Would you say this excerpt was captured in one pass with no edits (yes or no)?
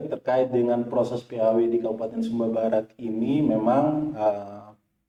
yes